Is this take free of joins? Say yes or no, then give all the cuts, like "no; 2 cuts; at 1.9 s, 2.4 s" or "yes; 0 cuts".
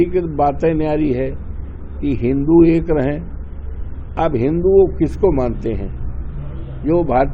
yes; 0 cuts